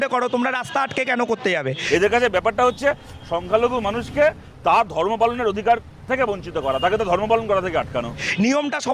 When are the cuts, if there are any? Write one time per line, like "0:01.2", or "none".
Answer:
0:01.8
0:08.0